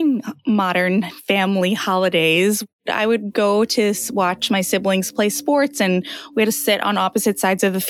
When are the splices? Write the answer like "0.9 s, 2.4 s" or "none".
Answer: none